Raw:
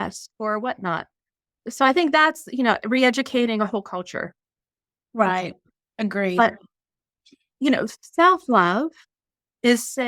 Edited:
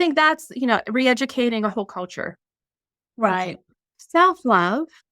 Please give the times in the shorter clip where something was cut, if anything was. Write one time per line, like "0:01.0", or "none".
0:03.9

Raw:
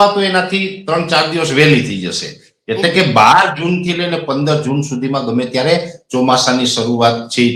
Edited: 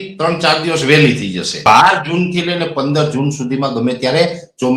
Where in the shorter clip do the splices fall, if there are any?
0:01.6

